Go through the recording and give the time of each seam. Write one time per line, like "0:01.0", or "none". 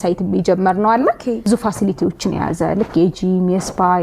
0:01.5

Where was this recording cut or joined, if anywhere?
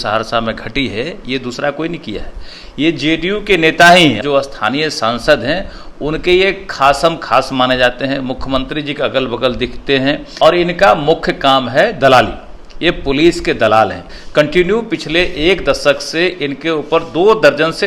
0:04.2
0:10.3
0:14.1

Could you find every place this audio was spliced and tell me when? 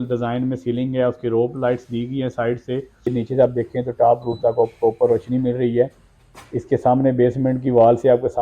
0:03.1

